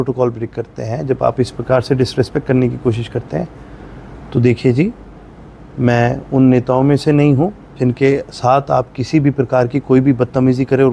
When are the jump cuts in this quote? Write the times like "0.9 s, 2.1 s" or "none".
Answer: none